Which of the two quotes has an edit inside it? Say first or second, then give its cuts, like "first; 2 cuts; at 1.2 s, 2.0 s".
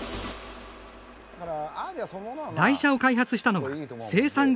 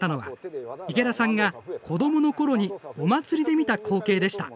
first; 1 cut; at 1.3 s